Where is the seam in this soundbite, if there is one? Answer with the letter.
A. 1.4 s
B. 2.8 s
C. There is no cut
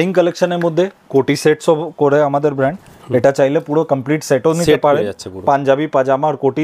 C